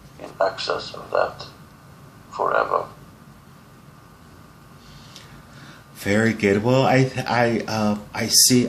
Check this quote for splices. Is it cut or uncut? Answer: uncut